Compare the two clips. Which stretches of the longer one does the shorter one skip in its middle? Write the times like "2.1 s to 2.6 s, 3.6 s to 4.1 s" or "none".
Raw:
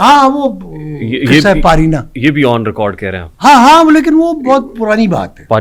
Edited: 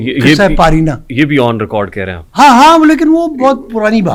none